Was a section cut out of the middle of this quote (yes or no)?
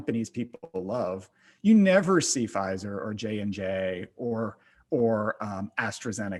no